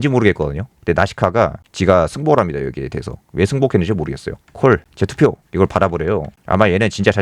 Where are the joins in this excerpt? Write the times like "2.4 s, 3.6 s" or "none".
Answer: 1.6 s, 4.4 s